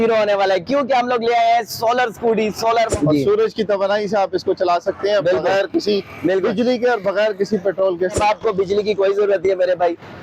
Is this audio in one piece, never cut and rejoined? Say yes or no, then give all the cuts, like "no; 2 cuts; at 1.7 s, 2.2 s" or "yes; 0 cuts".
no; 2 cuts; at 2.9 s, 8.2 s